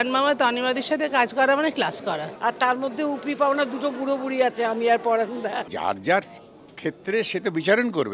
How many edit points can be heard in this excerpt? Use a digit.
2